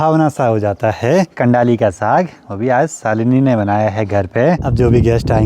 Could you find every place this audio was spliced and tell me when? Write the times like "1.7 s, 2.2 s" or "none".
1.3 s, 4.7 s

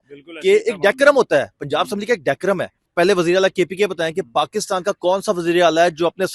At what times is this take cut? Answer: 2.8 s

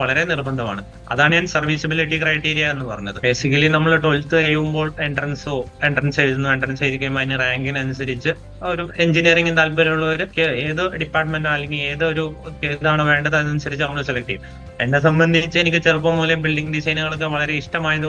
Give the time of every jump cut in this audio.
3.1 s, 8.9 s, 10.3 s

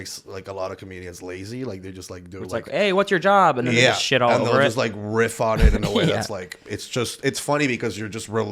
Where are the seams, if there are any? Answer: none

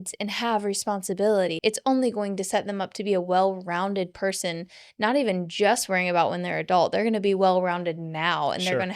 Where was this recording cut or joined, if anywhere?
1.5 s

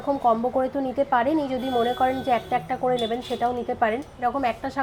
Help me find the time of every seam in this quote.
none

